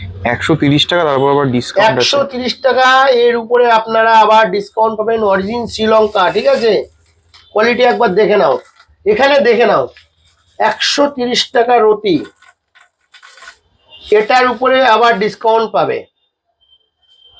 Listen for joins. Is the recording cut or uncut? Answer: uncut